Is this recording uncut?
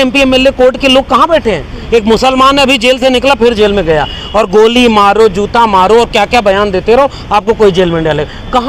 yes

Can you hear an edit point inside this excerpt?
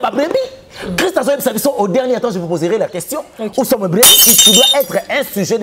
yes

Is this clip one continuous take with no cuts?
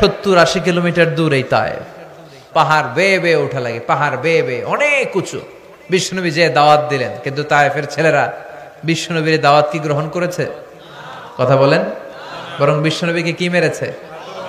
yes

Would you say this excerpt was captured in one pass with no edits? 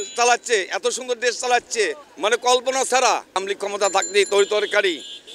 no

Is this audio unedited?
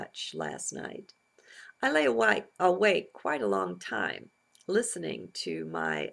no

